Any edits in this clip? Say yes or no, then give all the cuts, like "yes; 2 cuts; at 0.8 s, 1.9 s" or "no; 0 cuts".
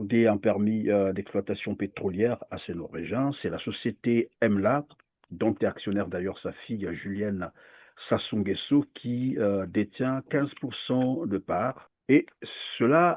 yes; 1 cut; at 11.9 s